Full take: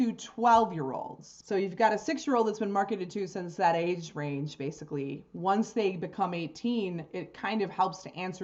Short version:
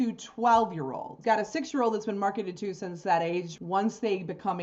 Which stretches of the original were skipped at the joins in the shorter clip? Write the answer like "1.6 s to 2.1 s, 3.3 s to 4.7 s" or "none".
1.2 s to 1.7 s, 4.1 s to 5.3 s